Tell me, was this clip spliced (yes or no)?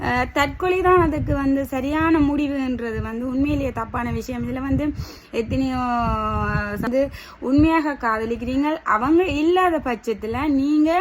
yes